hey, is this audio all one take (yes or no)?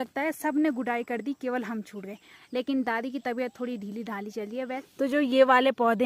no